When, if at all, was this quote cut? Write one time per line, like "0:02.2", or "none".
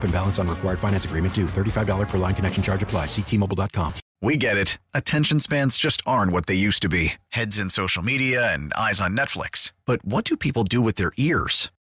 0:04.0